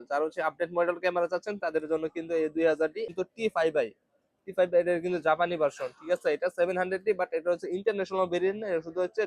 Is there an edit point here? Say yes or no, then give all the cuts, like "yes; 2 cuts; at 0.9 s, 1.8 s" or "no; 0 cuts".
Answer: yes; 1 cut; at 3.1 s